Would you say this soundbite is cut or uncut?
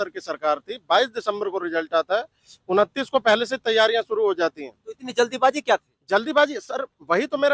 uncut